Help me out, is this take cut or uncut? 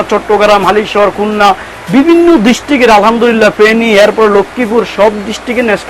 uncut